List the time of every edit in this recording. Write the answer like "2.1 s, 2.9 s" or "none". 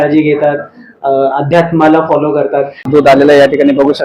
2.8 s

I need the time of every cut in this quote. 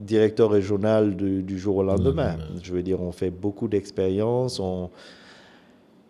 none

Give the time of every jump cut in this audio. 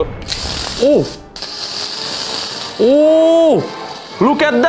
none

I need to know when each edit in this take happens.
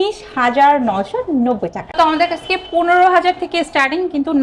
none

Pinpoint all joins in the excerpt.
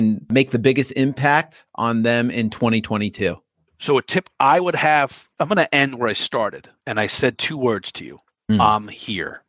3.4 s, 5.2 s

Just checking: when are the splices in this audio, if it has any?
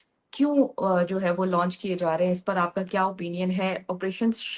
none

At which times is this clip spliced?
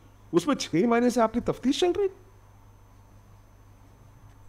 none

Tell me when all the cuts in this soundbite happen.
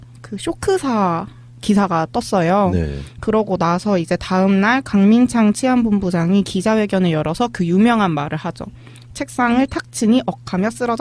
8.4 s

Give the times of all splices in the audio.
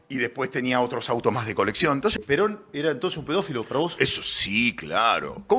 2.2 s

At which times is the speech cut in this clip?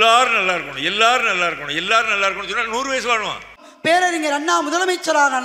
3.7 s

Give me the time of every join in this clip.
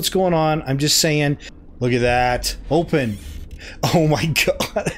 1.5 s

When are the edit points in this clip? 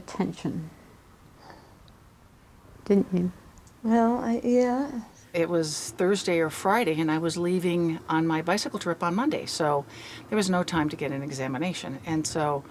5.3 s

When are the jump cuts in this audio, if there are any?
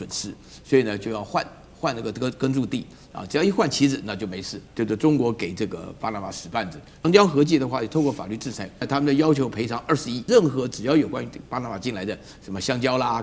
4.6 s, 7.0 s, 8.8 s, 10.3 s

